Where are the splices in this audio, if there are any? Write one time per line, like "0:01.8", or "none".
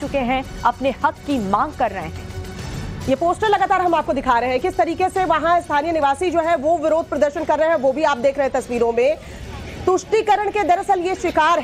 none